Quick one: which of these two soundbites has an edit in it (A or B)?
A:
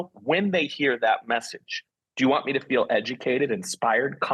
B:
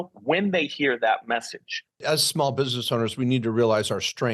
B